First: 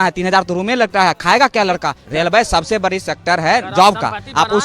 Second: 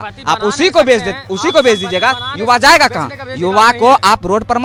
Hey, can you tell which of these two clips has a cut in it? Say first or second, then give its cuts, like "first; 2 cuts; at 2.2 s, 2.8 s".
first; 1 cut; at 2.0 s